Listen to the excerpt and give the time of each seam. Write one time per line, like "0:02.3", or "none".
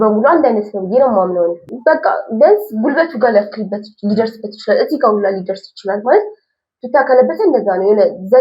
0:01.7